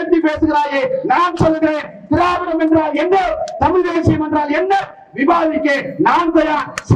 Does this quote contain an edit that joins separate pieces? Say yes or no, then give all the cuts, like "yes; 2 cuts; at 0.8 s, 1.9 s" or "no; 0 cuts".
no; 0 cuts